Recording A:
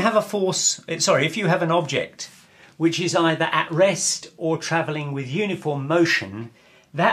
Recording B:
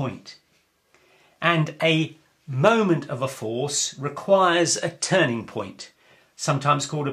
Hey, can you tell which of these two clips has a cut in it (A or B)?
B